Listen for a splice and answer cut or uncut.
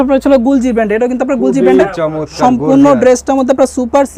uncut